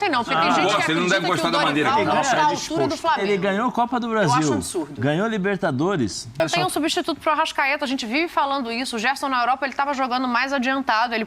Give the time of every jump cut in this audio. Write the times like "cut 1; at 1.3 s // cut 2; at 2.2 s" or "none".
cut 1; at 6.4 s

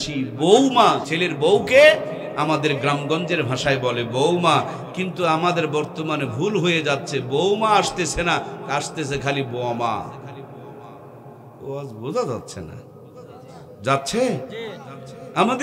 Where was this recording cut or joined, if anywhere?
cut 1; at 1.1 s

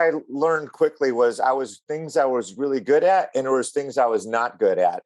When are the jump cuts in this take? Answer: none

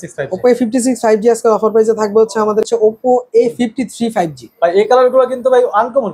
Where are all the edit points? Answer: cut 1; at 2.7 s

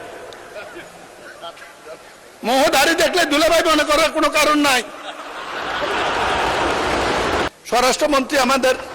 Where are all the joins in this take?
cut 1; at 7.5 s

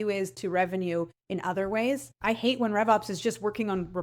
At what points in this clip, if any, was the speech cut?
cut 1; at 2.2 s

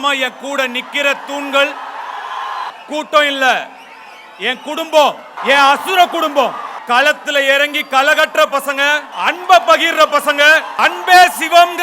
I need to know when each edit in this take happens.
cut 1; at 6.7 s // cut 2; at 9.1 s // cut 3; at 10.7 s

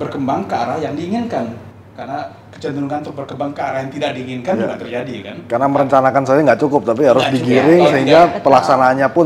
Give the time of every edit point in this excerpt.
none

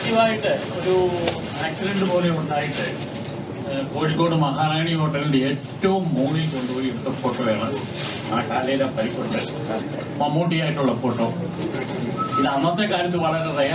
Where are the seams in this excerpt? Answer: cut 1; at 9.8 s

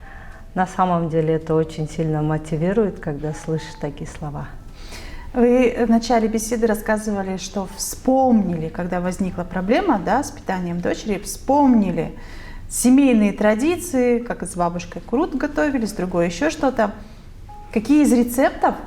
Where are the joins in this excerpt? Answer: none

